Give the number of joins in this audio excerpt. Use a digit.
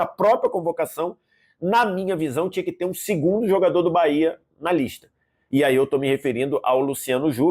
0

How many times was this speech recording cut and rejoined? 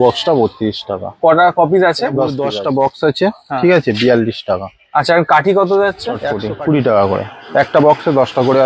2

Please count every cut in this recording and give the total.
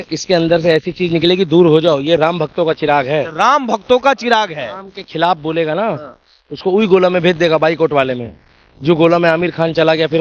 0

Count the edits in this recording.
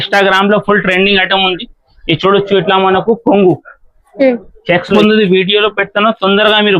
1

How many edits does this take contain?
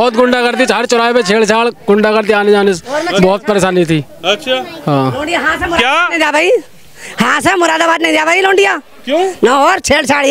0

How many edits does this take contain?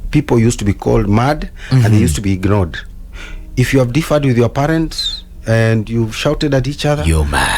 0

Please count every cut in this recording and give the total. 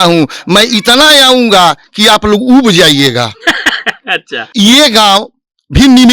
1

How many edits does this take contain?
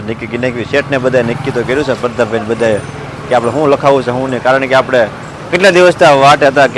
0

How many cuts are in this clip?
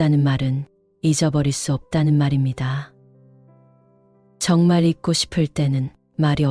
2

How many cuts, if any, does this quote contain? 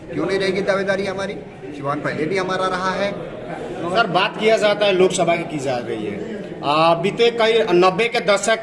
1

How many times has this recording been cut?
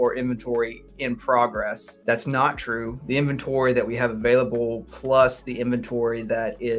1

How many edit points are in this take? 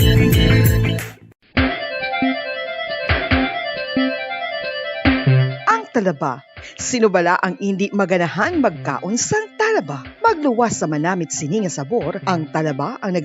1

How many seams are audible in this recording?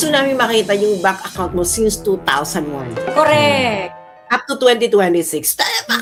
0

